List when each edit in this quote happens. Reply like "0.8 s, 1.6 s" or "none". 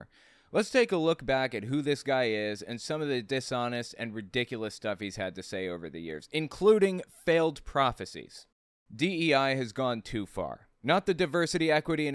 8.7 s